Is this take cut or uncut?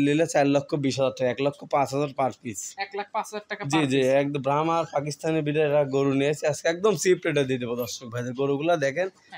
uncut